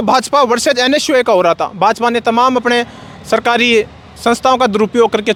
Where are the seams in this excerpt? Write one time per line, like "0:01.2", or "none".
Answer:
none